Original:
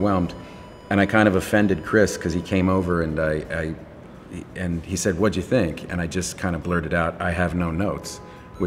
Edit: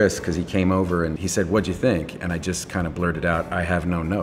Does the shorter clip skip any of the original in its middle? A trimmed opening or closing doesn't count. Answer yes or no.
yes